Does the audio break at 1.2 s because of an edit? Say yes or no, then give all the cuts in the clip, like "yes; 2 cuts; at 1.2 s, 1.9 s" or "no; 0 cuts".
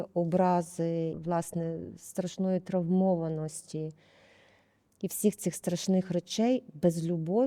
yes; 1 cut; at 1.2 s